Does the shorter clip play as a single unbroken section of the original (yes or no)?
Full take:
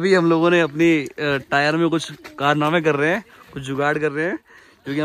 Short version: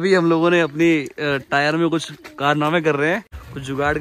yes